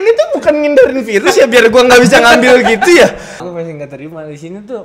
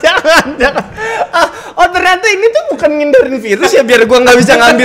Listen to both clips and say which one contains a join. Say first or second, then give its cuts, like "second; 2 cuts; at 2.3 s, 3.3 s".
first; 1 cut; at 3.4 s